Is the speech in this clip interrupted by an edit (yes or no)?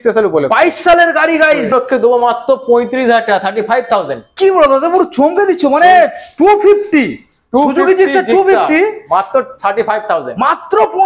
yes